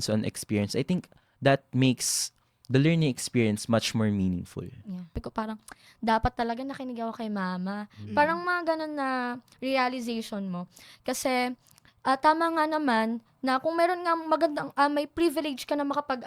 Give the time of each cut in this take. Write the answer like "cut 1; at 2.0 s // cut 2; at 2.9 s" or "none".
cut 1; at 5.2 s

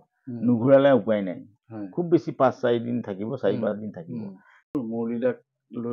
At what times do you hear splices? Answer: cut 1; at 4.7 s

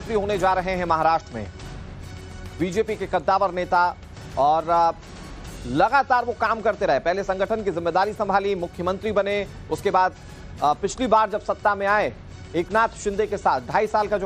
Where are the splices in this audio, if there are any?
none

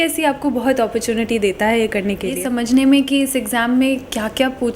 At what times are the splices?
cut 1; at 2.4 s

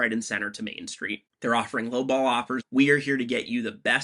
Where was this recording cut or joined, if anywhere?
cut 1; at 1.3 s // cut 2; at 2.6 s

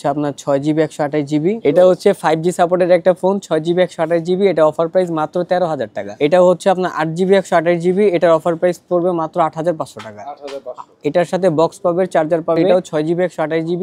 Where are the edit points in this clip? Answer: cut 1; at 1.6 s // cut 2; at 6.0 s // cut 3; at 12.6 s

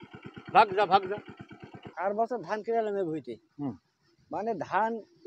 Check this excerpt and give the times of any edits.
cut 1; at 1.9 s

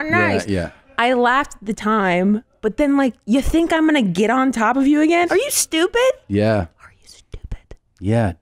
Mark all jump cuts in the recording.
cut 1; at 5.3 s

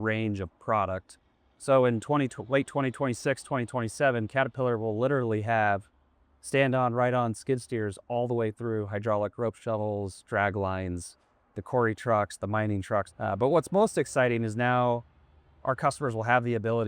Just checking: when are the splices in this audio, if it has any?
cut 1; at 13.1 s

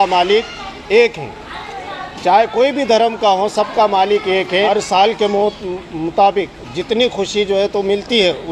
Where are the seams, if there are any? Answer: cut 1; at 4.5 s

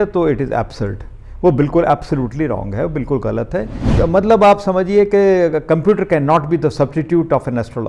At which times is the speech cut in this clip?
cut 1; at 3.8 s

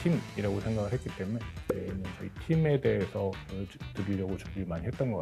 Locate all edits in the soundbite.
none

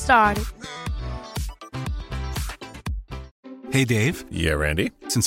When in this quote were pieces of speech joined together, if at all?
cut 1; at 3.2 s

